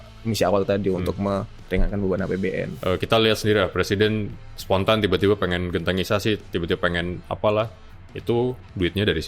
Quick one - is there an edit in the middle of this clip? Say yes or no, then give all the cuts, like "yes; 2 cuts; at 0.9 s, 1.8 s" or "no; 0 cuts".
yes; 1 cut; at 2.7 s